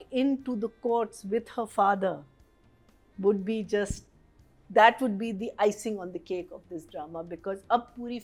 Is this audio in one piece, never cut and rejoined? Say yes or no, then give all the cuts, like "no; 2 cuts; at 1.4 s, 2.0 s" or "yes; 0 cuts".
yes; 0 cuts